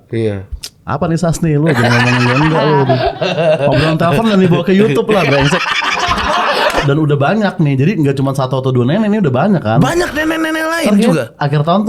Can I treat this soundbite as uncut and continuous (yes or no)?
no